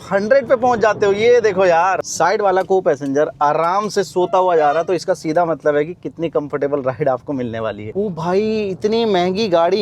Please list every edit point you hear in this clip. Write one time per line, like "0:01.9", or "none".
0:02.0
0:07.9

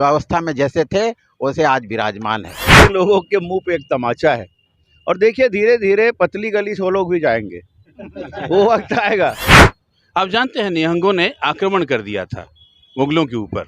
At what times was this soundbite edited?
0:02.8
0:09.6

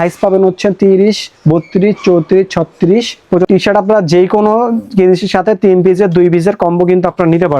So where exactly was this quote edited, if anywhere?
0:03.5

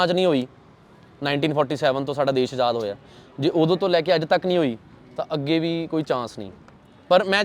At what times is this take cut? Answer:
none

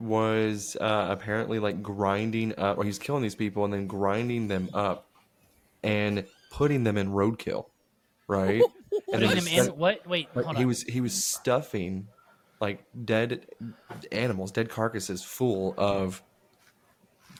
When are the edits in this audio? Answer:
none

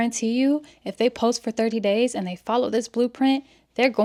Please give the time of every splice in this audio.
none

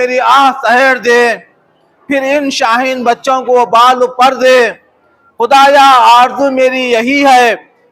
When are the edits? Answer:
0:01.0

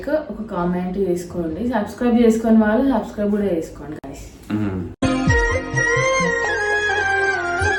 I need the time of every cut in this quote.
none

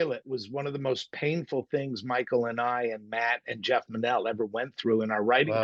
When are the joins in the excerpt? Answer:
none

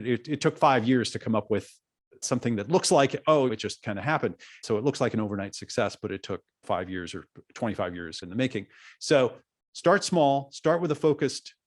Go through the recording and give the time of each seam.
0:04.5

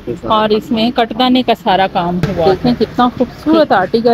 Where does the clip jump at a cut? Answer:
0:02.5

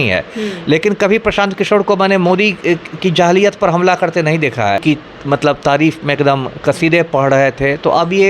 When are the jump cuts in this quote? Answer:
0:04.8

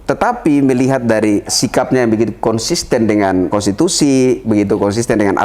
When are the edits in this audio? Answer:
0:01.6
0:03.5
0:04.4

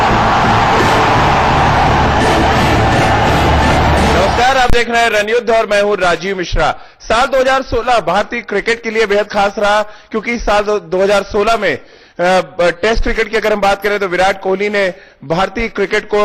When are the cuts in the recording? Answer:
none

